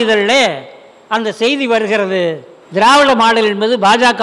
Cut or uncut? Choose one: cut